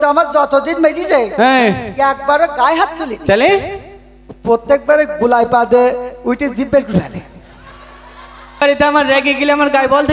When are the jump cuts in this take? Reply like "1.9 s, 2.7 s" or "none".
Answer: 8.6 s